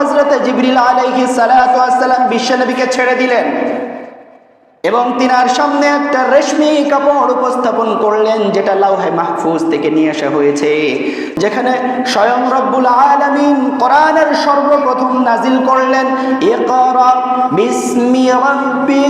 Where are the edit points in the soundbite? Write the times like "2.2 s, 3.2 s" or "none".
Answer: 11.3 s